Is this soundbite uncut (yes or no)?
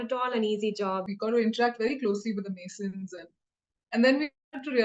no